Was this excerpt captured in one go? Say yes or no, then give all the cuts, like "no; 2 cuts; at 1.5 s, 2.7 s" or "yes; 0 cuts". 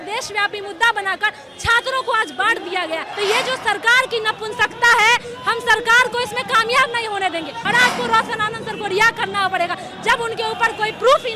no; 2 cuts; at 3.1 s, 7.6 s